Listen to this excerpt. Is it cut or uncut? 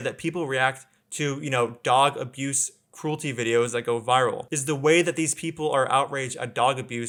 uncut